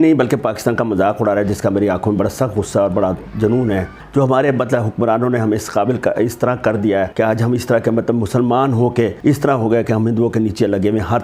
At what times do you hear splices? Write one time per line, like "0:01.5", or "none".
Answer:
0:04.0
0:07.1
0:09.2